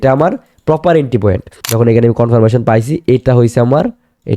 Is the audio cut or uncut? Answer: cut